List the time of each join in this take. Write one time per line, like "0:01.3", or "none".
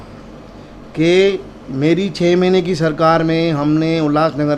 none